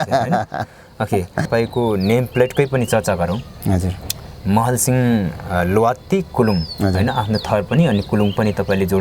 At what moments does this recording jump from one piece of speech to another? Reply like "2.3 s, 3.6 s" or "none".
1.5 s